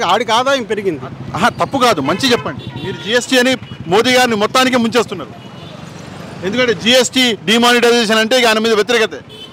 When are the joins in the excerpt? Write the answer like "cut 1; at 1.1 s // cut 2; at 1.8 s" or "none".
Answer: none